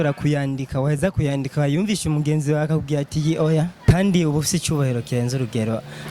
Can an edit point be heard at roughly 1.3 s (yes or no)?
no